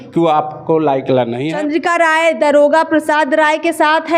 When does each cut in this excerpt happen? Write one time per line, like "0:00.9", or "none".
0:01.4